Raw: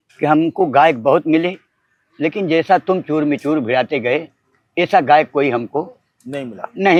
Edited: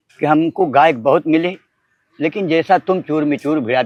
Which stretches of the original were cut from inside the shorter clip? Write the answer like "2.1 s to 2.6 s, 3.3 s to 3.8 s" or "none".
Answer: none